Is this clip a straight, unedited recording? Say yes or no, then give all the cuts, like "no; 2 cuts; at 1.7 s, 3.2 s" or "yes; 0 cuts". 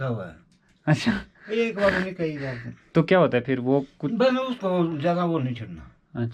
yes; 0 cuts